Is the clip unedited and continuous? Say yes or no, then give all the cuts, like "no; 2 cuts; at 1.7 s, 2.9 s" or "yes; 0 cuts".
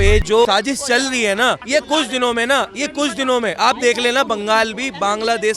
yes; 0 cuts